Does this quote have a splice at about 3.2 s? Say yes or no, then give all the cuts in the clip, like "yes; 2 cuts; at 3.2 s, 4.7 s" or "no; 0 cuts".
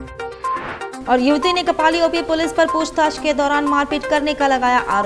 no; 1 cut; at 0.9 s